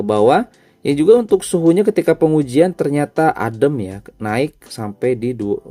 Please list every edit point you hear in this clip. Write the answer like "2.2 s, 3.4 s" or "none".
none

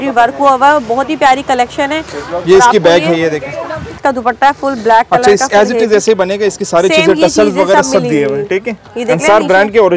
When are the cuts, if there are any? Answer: 4.0 s

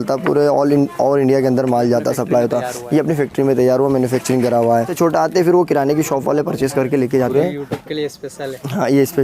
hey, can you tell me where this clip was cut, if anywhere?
4.9 s, 7.3 s

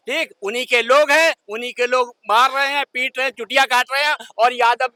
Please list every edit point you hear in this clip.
none

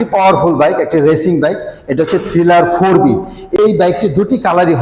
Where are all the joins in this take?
3.6 s

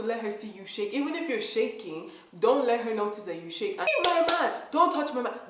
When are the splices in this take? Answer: 3.9 s

